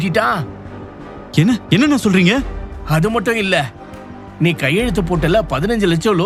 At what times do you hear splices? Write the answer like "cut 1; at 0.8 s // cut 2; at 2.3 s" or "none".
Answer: none